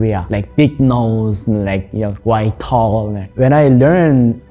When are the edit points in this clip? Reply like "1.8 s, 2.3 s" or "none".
3.3 s